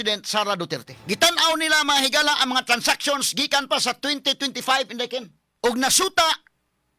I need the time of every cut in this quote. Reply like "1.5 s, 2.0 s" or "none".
0.9 s, 5.4 s